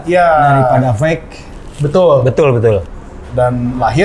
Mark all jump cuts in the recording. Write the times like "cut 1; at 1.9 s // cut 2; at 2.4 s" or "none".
none